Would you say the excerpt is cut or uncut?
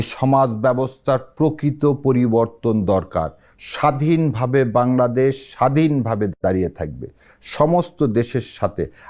uncut